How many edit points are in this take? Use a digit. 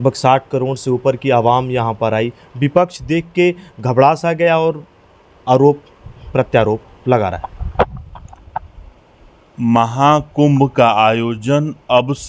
0